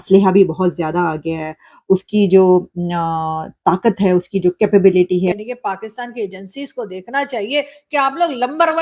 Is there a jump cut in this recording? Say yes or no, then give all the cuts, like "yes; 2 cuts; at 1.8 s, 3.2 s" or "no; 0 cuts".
yes; 1 cut; at 5.3 s